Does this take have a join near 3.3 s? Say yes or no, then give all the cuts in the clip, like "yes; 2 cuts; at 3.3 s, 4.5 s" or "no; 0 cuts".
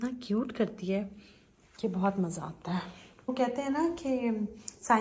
yes; 1 cut; at 3.3 s